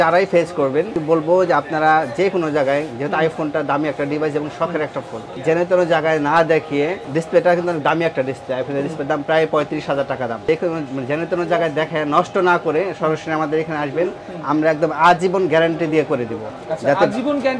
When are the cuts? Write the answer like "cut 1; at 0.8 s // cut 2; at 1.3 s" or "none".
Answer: cut 1; at 1.0 s // cut 2; at 5.3 s // cut 3; at 7.0 s // cut 4; at 10.4 s